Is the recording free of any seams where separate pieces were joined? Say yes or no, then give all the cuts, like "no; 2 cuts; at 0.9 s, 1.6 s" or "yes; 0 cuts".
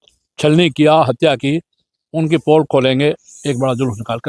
yes; 0 cuts